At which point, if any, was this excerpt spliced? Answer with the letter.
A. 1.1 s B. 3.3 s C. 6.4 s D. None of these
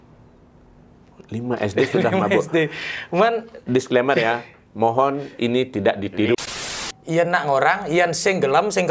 C